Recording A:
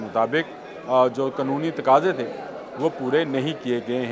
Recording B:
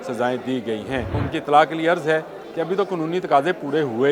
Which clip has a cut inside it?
B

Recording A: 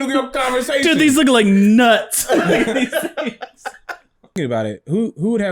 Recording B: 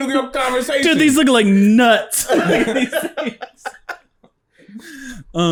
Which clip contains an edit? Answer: A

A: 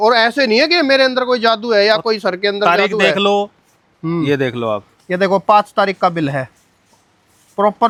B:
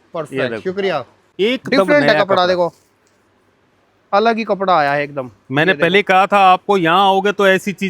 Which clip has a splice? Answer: B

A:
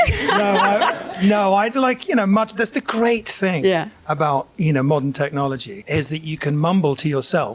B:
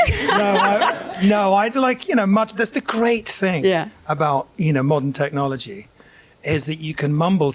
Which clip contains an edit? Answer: A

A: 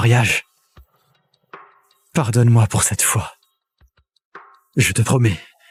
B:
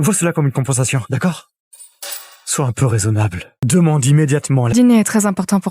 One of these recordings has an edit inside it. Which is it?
B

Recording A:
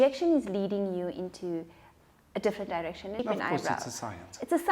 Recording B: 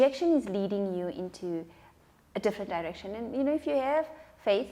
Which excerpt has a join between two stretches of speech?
A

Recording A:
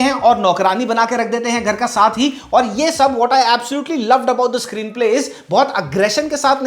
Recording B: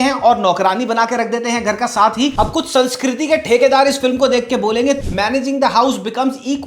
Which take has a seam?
B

